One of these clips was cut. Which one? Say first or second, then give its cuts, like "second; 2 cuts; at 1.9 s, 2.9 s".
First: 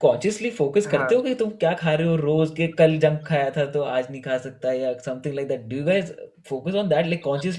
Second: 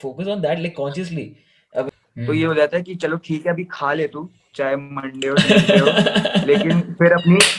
second; 1 cut; at 2.0 s